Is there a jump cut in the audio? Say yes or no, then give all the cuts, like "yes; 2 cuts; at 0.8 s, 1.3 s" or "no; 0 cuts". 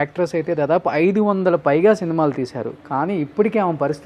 no; 0 cuts